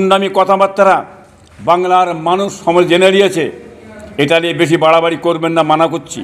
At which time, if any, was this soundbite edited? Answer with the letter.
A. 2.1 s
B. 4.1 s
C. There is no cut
C